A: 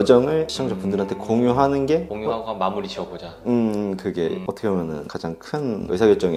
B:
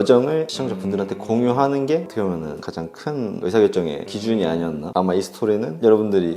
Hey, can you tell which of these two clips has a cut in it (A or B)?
B